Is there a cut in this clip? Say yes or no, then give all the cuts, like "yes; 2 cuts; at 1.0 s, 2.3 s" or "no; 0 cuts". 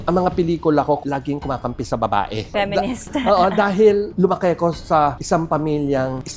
no; 0 cuts